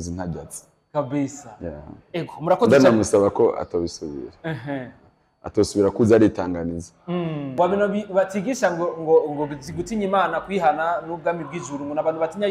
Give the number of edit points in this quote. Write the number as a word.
one